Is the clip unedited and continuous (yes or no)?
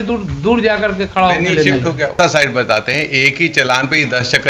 no